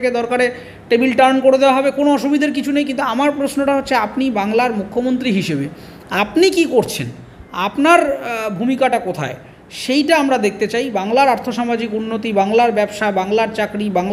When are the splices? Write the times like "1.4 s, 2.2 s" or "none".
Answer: none